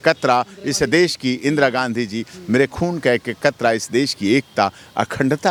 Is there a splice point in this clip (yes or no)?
no